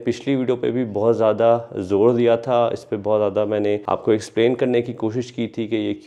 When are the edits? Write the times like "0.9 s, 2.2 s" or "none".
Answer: none